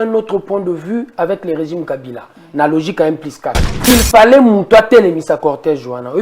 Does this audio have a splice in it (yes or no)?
yes